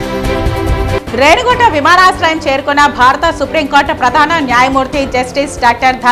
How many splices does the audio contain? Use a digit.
1